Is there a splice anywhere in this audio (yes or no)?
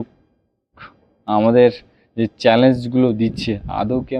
no